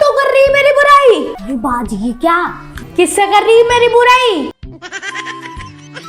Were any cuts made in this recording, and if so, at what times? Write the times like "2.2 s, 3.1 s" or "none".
1.3 s